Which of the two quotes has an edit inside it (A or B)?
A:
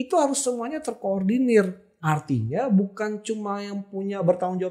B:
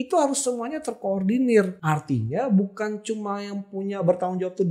B